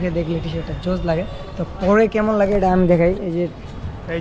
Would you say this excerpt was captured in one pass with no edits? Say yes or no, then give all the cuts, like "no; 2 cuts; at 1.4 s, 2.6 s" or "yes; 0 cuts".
yes; 0 cuts